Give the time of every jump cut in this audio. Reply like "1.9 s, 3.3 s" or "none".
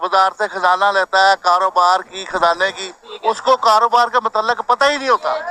none